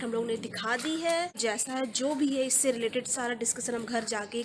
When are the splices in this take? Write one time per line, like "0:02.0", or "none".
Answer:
0:01.4

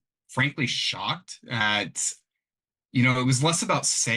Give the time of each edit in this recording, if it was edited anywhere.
0:01.6

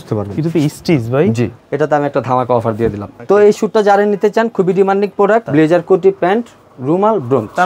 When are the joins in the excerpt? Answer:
0:01.6
0:03.1
0:05.5

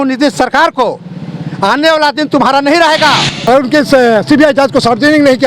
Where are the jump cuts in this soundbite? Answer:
0:03.3

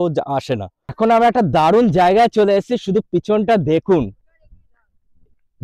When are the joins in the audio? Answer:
0:00.9

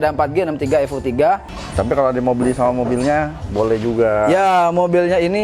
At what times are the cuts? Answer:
0:01.5

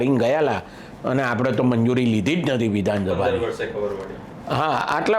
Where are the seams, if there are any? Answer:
none

